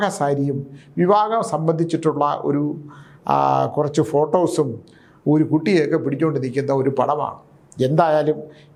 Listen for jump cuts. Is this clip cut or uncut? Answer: uncut